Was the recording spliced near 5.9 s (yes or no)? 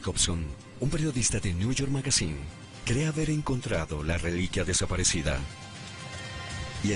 yes